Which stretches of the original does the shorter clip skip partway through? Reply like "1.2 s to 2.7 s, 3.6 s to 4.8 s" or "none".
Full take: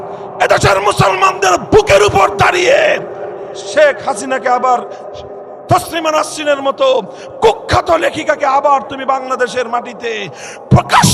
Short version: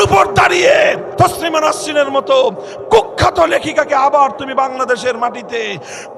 3.1 s to 5.6 s